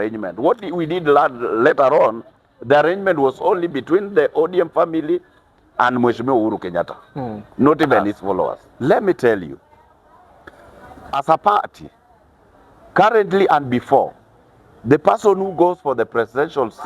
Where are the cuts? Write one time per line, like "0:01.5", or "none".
0:08.6